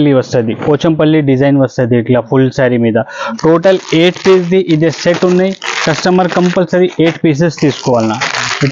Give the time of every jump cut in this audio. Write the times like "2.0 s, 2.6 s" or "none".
none